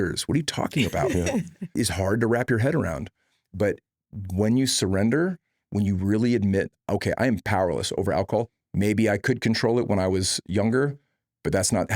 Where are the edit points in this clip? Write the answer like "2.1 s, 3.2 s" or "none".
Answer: 1.7 s, 8.6 s